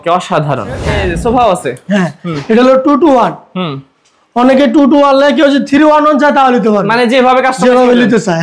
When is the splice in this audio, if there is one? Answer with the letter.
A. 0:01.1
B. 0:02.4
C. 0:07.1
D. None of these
A